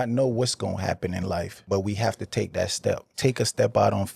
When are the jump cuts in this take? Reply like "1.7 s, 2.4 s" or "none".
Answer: 1.6 s, 3.1 s